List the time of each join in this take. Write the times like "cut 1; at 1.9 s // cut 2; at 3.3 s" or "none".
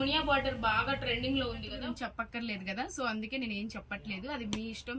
cut 1; at 1.7 s

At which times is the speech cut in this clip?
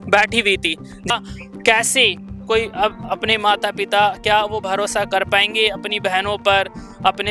cut 1; at 1.1 s

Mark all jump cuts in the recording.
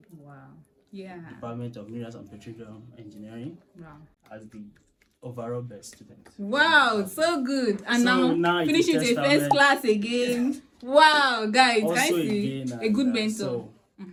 none

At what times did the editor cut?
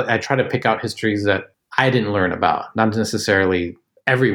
cut 1; at 1.5 s

